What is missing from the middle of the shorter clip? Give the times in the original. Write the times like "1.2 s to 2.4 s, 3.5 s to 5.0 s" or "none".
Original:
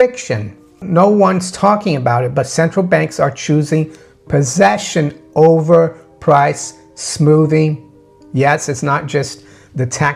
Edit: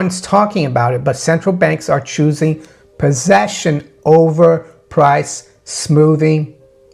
none